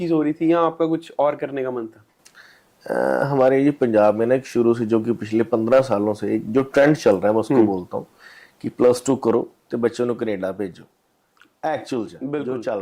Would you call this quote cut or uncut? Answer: uncut